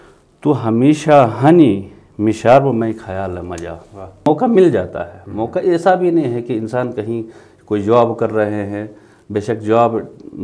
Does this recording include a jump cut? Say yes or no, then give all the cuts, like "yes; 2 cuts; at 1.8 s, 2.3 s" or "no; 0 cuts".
yes; 1 cut; at 4.3 s